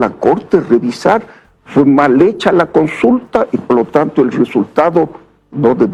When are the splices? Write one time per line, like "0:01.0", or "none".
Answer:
none